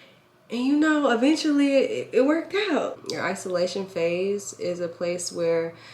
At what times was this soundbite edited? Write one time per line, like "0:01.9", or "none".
0:03.0